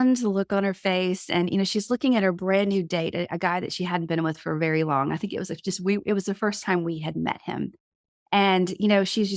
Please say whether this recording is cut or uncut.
uncut